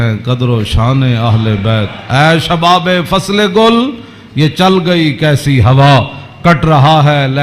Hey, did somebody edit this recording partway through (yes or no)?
no